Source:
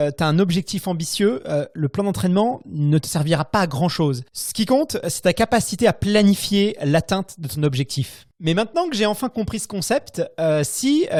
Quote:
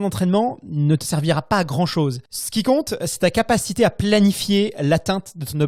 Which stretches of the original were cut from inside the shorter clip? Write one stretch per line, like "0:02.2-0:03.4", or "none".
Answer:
none